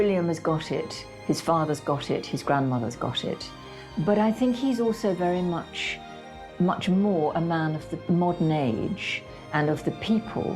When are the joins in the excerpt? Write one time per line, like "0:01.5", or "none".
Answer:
0:03.6
0:08.0